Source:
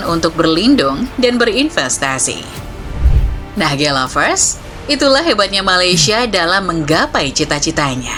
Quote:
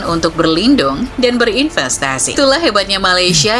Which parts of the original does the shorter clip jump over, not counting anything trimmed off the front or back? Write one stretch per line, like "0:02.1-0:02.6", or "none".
0:02.3-0:05.0